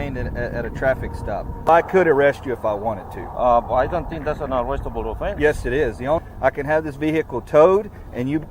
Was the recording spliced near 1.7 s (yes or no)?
yes